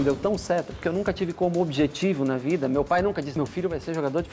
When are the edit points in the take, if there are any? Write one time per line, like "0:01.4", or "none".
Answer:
0:03.3